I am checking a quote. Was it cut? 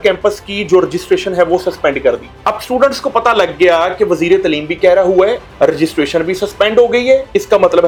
no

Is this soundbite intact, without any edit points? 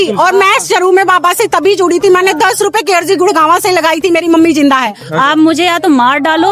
no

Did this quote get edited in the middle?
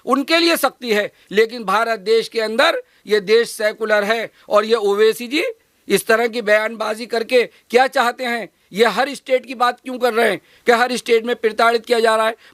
no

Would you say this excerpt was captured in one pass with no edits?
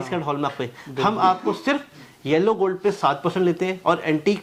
yes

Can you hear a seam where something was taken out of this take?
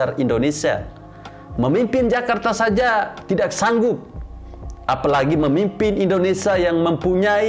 no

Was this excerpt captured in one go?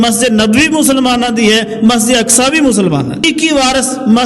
no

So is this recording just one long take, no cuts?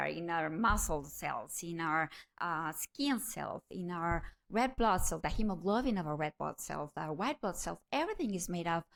yes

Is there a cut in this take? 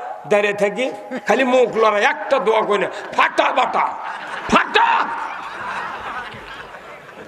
no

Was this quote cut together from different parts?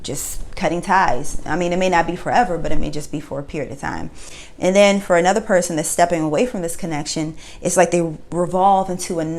no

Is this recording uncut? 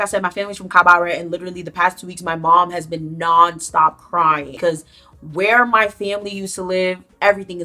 no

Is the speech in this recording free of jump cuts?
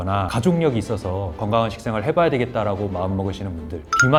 yes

